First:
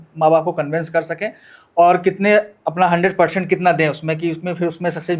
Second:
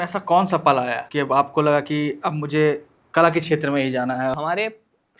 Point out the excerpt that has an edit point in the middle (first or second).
second